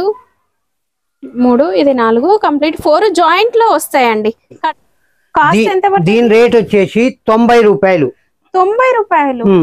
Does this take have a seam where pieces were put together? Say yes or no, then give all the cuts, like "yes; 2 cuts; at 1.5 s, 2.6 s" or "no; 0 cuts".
yes; 1 cut; at 4.7 s